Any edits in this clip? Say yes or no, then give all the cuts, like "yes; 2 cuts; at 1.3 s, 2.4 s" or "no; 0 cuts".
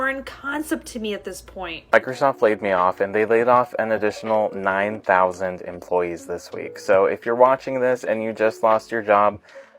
yes; 1 cut; at 1.8 s